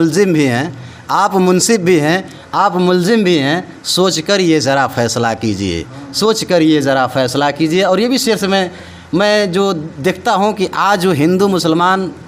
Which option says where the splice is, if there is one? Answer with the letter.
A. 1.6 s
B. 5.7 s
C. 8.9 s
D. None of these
D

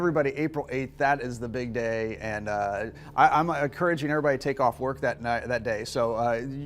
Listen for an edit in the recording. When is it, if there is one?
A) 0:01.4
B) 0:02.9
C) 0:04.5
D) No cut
C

